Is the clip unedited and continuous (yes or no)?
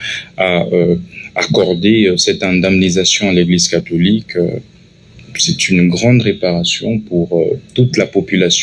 yes